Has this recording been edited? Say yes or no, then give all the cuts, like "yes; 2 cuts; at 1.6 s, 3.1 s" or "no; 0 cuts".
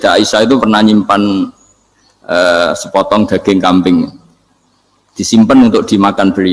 no; 0 cuts